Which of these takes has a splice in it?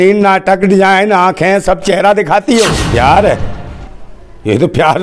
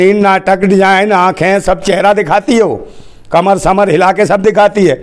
first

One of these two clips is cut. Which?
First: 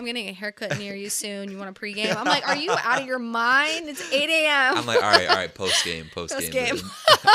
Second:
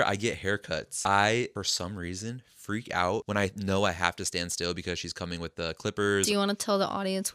second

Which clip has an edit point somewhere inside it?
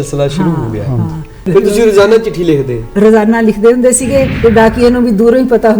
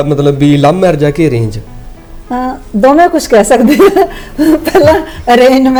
first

